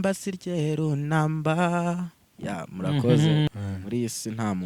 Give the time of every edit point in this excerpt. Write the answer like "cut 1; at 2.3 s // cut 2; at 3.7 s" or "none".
cut 1; at 3.5 s